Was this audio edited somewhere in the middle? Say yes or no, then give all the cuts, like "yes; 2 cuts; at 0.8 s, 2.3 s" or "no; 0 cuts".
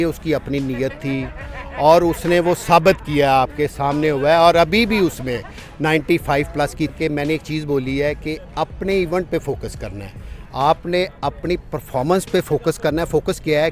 yes; 1 cut; at 6.9 s